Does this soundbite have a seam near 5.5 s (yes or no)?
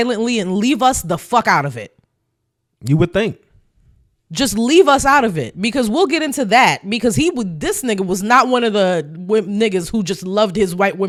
no